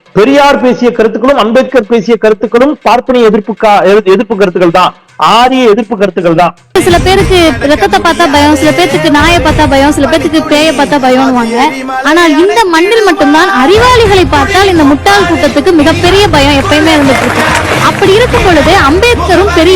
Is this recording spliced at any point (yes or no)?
no